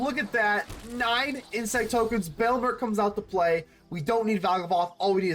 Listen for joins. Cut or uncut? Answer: uncut